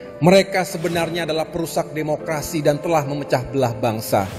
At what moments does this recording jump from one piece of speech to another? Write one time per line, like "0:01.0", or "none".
none